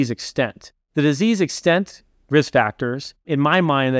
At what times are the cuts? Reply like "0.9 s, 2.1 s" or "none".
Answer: none